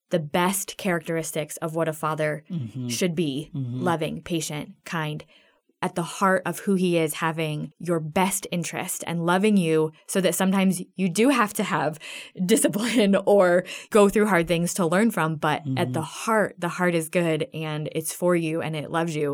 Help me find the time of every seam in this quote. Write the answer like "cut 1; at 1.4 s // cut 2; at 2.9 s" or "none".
cut 1; at 5.8 s // cut 2; at 7.7 s // cut 3; at 13.8 s